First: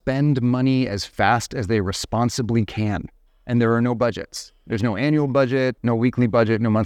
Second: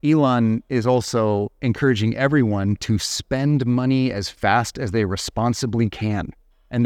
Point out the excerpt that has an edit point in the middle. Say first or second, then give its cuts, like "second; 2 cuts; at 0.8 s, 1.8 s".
first; 1 cut; at 5.8 s